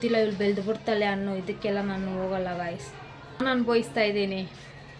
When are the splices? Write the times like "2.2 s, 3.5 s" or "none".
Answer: 3.4 s